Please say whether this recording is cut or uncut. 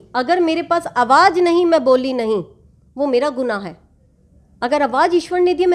uncut